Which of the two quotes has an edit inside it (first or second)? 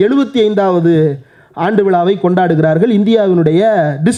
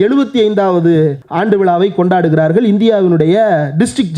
second